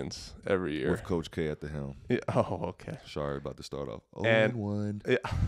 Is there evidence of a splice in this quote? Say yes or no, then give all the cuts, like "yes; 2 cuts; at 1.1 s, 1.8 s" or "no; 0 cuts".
no; 0 cuts